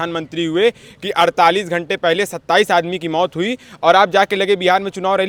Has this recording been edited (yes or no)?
no